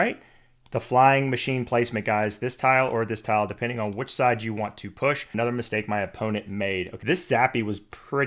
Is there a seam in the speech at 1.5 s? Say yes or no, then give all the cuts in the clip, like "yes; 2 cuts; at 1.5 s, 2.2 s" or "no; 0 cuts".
no; 2 cuts; at 5.3 s, 6.9 s